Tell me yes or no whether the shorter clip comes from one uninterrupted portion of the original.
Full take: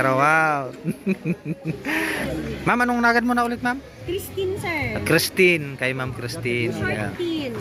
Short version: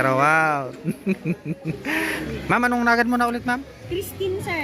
no